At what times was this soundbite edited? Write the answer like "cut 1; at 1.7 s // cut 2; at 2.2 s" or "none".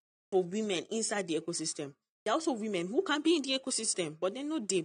none